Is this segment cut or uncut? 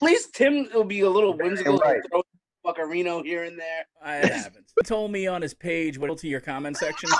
cut